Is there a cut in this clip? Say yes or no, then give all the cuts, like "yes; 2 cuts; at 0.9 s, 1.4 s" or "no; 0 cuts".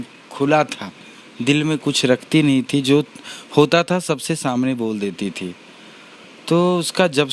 no; 0 cuts